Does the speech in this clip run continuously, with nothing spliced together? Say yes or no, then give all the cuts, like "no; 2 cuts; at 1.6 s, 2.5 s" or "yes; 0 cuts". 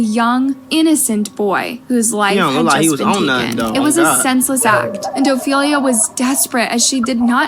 yes; 0 cuts